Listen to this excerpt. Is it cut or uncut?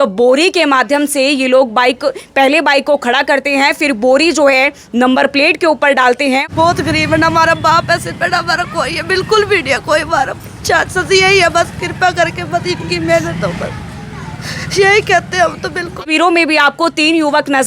cut